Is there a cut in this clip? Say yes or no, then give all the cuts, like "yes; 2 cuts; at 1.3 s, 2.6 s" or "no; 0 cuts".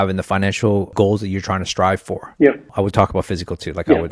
yes; 2 cuts; at 0.9 s, 2.7 s